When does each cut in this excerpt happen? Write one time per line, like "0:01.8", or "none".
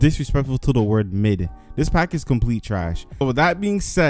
0:03.0